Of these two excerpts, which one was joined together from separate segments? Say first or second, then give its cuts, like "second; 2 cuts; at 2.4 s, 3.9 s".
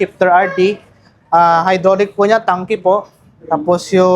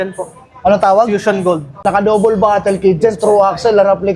second; 1 cut; at 1.8 s